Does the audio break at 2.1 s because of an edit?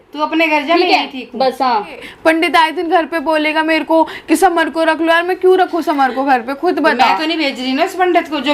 yes; 1 cut; at 2.1 s

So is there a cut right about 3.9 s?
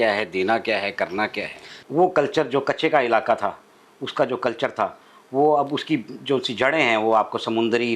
no; 1 cut; at 1.8 s

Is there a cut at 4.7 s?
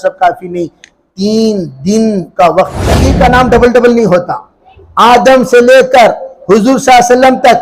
no; 1 cut; at 3.0 s

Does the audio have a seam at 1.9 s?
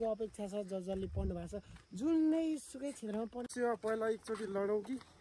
no; 1 cut; at 3.5 s

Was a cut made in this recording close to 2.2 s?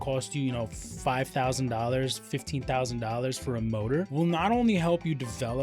no; 1 cut; at 4.1 s

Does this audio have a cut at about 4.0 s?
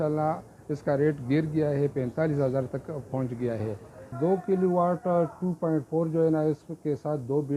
yes; 1 cut; at 4.0 s

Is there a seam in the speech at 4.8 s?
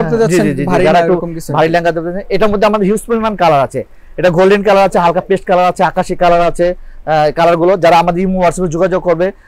no; 0 cuts

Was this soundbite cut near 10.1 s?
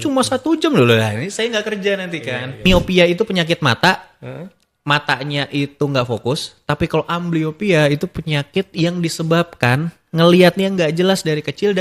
no; 1 cut; at 2.7 s

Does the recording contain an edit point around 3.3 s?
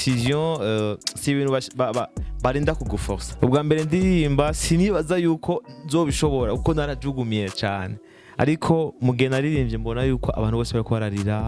yes; 1 cut; at 3.3 s

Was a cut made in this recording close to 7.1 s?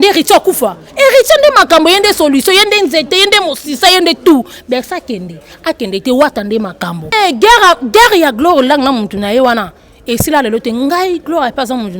yes; 1 cut; at 7.1 s

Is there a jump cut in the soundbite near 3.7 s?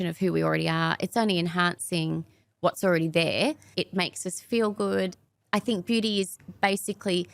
yes; 2 cuts; at 3.7 s, 5.2 s

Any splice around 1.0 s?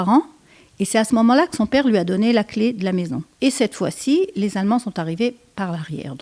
no; 1 cut; at 3.2 s

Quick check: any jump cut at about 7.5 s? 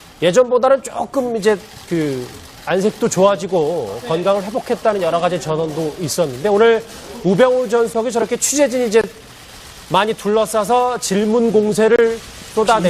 yes; 1 cut; at 7.5 s

